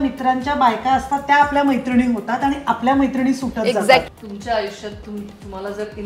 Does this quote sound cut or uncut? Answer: cut